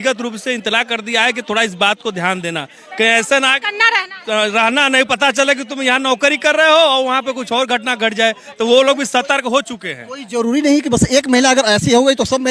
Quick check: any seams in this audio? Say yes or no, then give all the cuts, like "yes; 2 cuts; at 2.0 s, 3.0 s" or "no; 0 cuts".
no; 0 cuts